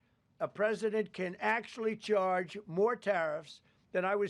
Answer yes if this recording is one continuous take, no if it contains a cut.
yes